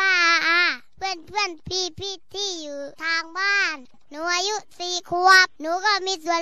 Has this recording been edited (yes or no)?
no